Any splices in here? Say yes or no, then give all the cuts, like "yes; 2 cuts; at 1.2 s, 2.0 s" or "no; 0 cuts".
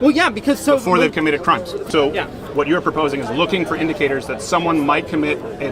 yes; 1 cut; at 1.8 s